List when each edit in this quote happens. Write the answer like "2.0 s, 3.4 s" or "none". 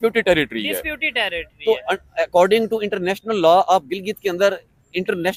none